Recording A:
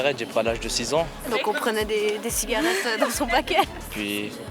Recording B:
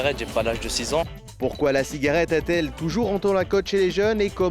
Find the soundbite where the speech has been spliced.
B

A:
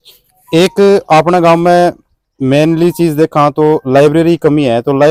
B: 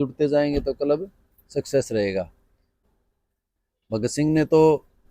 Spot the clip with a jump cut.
B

